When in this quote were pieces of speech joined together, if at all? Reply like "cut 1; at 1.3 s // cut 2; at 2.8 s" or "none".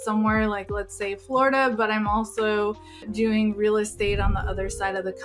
cut 1; at 3.0 s